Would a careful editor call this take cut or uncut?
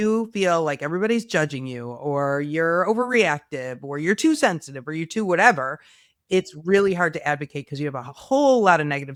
uncut